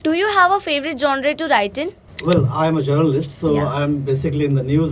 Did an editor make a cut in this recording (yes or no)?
yes